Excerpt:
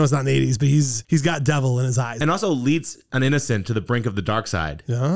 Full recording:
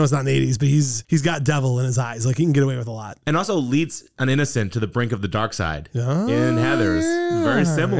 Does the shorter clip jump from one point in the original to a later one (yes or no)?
yes